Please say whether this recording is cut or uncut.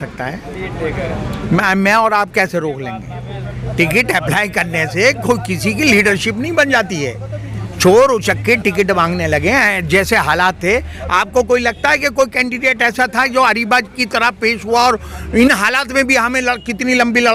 uncut